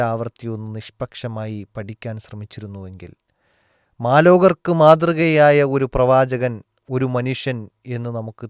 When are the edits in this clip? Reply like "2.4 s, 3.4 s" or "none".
none